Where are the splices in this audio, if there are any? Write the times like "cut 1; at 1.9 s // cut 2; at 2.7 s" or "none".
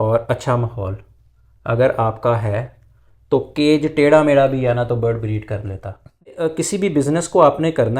cut 1; at 6.4 s